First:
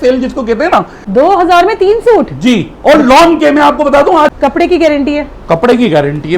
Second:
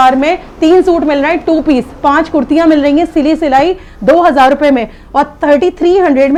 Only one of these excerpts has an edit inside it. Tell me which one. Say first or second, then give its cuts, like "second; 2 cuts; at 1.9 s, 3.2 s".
first; 2 cuts; at 1.0 s, 4.3 s